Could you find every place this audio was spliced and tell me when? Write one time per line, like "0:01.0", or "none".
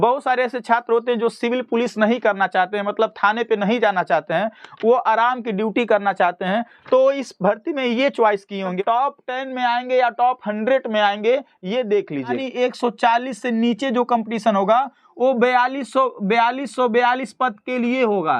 0:08.8
0:12.3